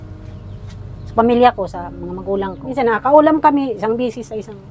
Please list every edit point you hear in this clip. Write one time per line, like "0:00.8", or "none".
0:02.6